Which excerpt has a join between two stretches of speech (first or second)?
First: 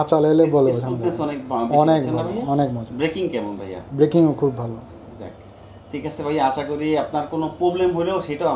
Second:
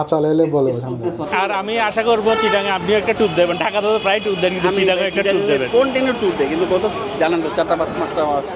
second